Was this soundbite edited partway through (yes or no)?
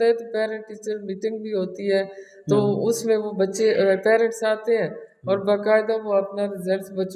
no